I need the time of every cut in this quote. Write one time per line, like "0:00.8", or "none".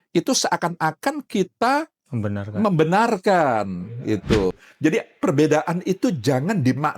0:04.6